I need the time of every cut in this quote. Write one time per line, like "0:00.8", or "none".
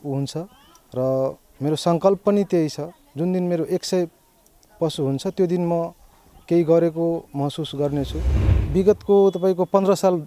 0:08.5